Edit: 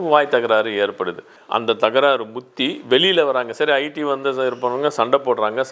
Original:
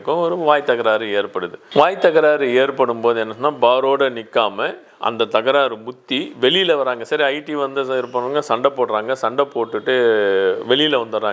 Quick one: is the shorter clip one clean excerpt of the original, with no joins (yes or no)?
no